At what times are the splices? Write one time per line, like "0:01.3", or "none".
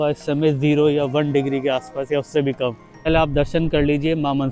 0:03.1

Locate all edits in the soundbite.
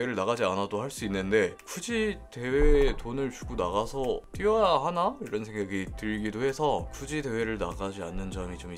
none

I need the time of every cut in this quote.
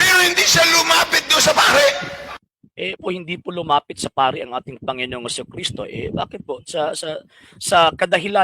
0:03.0

